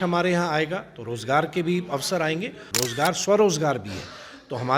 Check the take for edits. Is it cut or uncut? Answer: cut